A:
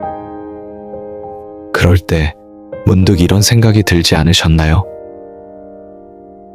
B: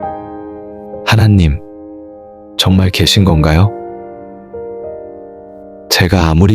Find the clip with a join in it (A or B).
B